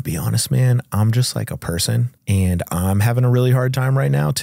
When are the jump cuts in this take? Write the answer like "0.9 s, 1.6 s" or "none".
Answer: 2.1 s

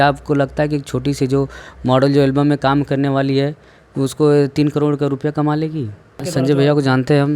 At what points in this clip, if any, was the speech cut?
6.3 s

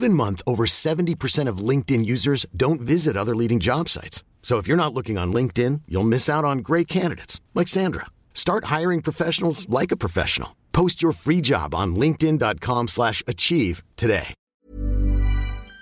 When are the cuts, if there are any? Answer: 14.4 s

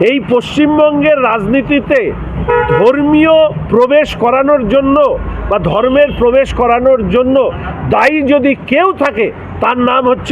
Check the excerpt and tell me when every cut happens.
none

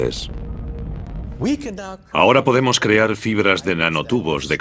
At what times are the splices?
3.7 s

